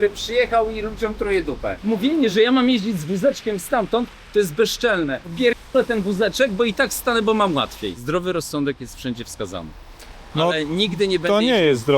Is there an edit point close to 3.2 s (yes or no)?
no